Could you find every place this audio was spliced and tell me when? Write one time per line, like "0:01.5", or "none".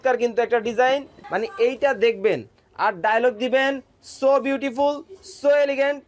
0:01.2